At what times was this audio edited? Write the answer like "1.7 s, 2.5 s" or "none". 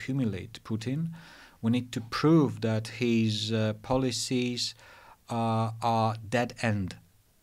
none

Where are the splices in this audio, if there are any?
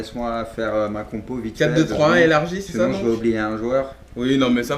3.6 s

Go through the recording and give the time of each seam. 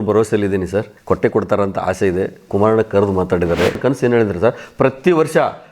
0.9 s, 3.8 s

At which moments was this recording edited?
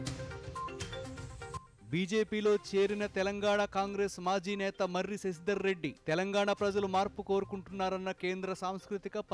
1.5 s

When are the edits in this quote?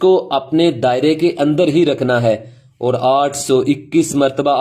none

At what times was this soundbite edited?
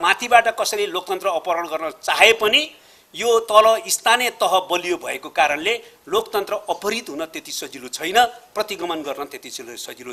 none

